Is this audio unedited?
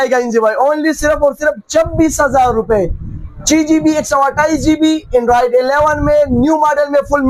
yes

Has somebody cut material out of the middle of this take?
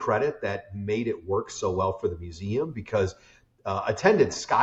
no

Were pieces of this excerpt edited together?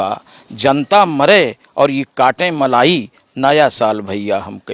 no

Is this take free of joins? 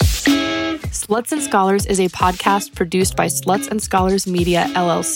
no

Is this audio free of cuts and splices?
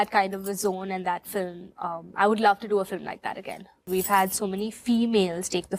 no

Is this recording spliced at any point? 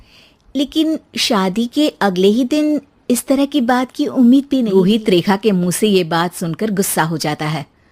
yes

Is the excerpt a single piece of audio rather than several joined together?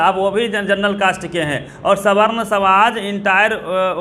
yes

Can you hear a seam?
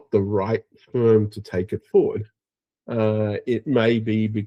no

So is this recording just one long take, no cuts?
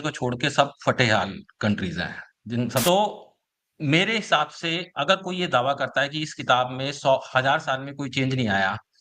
no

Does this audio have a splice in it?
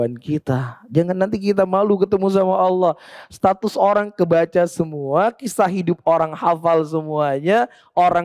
no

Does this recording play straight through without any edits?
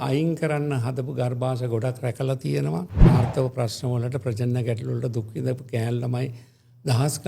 no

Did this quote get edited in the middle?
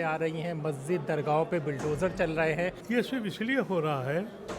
yes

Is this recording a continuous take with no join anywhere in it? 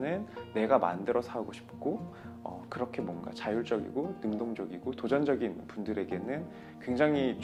yes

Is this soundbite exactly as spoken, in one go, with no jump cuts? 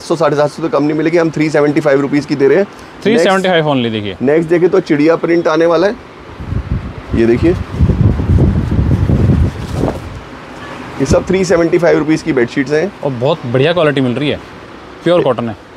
yes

